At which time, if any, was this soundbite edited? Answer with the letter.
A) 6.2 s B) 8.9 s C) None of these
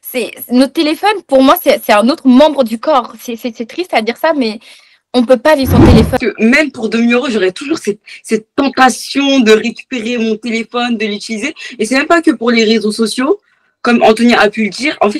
A